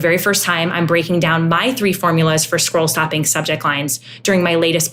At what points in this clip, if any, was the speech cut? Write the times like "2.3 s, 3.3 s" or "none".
none